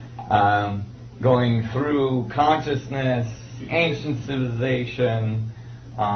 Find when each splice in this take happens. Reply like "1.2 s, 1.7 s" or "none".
4.6 s